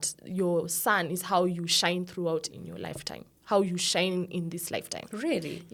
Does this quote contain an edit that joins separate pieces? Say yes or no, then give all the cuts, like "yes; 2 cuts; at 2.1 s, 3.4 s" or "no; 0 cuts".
no; 0 cuts